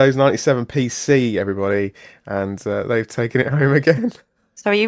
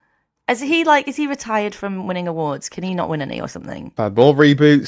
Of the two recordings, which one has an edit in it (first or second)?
second